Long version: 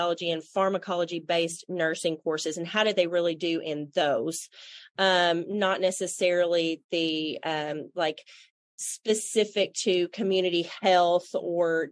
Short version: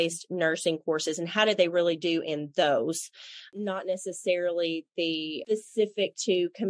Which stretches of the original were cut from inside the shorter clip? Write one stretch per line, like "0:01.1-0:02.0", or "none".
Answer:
0:04.9-0:05.4
0:07.3-0:08.9